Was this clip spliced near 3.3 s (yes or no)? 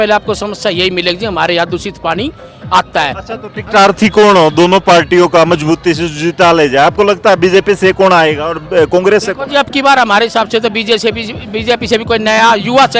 no